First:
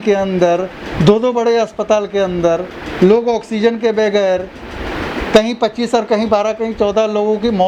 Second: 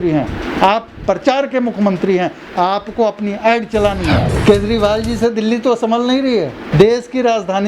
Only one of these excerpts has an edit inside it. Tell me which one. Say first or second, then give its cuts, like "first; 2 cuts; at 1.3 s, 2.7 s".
second; 2 cuts; at 4.3 s, 6.6 s